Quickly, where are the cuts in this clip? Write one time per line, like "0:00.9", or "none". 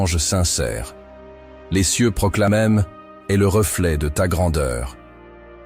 0:02.5